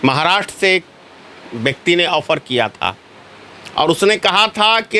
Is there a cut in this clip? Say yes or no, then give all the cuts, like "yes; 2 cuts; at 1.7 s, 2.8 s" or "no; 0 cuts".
no; 0 cuts